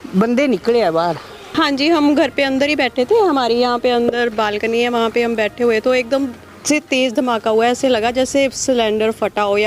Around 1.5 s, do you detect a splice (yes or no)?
yes